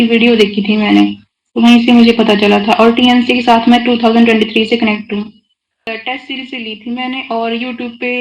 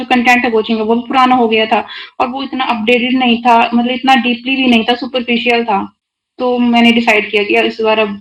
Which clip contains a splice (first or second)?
first